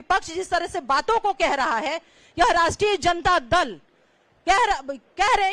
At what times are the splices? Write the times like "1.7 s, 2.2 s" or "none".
none